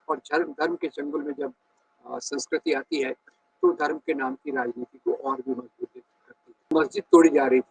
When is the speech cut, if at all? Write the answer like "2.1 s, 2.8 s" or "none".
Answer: 6.7 s